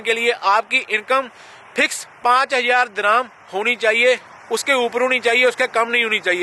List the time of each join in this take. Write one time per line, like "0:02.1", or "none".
none

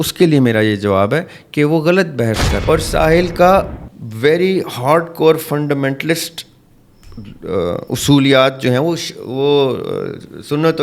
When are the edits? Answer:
0:02.5

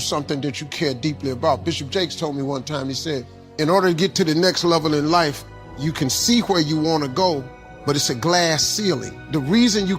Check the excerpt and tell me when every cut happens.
0:03.4

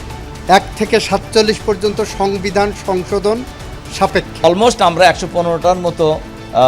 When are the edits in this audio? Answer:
0:04.4

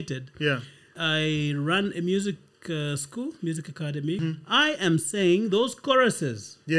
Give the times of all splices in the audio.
0:01.0
0:04.2

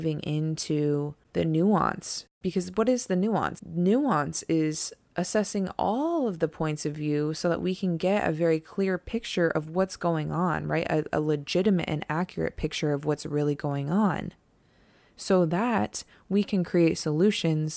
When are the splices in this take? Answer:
0:01.2
0:02.4
0:03.6

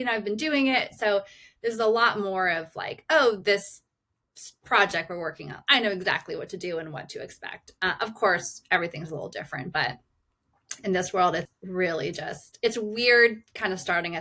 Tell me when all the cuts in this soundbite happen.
0:11.6

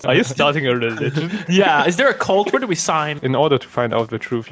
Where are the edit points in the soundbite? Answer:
0:03.1

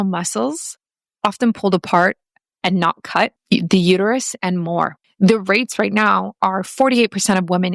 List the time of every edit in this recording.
0:03.4
0:05.0

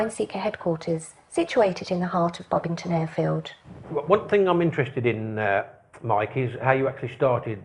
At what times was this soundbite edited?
none

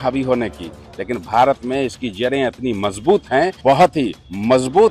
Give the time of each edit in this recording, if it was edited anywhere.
0:03.6

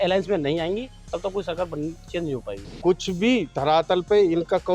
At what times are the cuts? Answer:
0:02.6

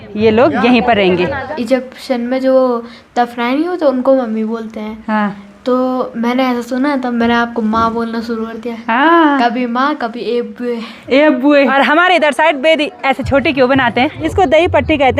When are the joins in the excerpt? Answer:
0:01.5
0:11.7
0:14.2

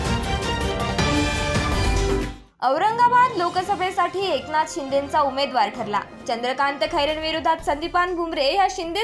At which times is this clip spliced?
0:02.4

